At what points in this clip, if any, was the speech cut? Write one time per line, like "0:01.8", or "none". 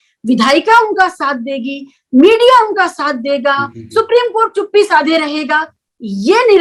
none